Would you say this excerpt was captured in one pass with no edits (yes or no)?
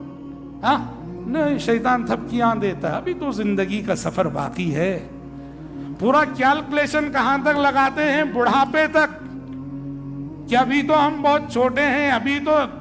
no